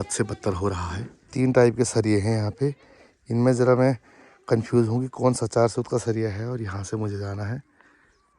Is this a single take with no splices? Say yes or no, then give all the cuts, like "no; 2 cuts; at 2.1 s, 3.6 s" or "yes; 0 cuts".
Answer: no; 1 cut; at 1.2 s